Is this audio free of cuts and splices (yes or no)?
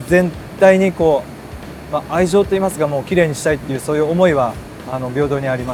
yes